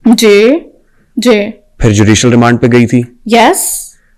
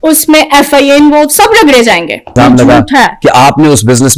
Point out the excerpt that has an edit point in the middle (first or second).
second